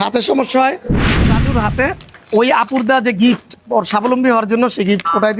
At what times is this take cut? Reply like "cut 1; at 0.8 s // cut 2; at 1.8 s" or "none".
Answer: cut 1; at 1.2 s